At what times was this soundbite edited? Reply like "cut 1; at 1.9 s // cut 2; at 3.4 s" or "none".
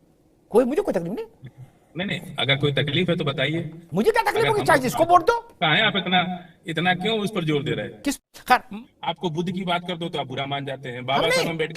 cut 1; at 8.2 s